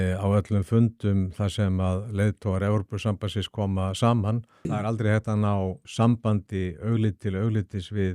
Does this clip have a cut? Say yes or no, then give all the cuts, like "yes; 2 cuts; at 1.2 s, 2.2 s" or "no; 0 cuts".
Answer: yes; 2 cuts; at 4.5 s, 5.8 s